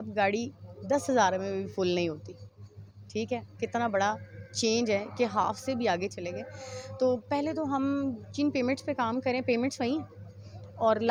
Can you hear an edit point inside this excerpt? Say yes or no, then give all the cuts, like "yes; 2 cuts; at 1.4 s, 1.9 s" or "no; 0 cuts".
no; 0 cuts